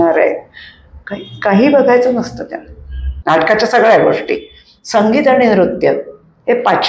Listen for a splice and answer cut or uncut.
cut